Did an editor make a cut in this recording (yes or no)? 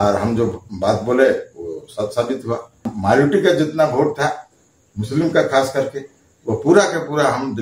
yes